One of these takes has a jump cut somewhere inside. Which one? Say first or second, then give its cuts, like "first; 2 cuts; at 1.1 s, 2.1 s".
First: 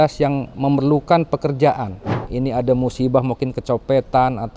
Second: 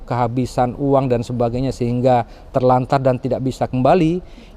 first; 1 cut; at 2.2 s